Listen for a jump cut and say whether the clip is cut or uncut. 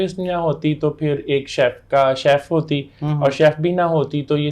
uncut